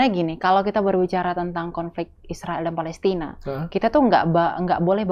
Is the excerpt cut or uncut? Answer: uncut